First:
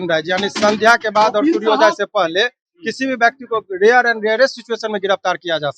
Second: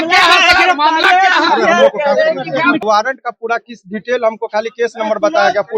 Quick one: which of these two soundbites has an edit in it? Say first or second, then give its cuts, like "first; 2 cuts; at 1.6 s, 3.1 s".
second; 1 cut; at 2.8 s